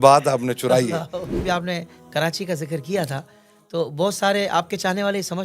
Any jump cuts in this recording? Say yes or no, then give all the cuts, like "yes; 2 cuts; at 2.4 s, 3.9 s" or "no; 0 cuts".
yes; 1 cut; at 1.3 s